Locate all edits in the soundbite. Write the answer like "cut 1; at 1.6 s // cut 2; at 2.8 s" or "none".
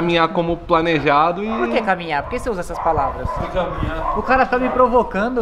none